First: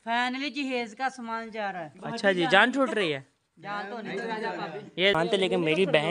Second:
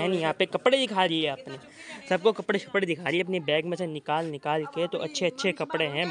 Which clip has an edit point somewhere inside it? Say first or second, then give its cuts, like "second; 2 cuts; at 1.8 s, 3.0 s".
first; 1 cut; at 5.1 s